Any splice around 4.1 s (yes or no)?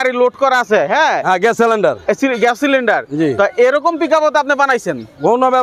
no